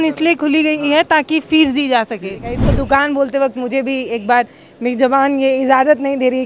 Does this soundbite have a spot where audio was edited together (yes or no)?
yes